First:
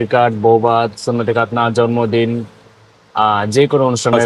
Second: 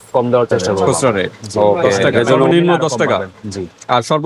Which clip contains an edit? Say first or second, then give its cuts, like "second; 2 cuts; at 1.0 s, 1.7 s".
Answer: second; 1 cut; at 2.5 s